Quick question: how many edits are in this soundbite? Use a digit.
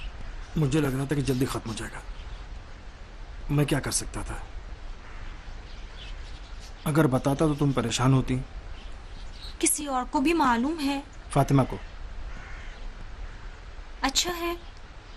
1